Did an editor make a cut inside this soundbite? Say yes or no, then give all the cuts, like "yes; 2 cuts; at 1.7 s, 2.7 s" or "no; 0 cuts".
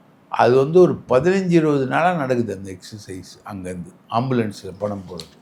no; 0 cuts